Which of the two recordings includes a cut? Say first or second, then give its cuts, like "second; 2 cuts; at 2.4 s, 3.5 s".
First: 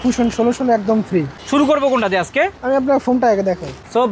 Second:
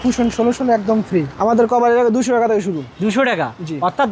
second; 1 cut; at 1.3 s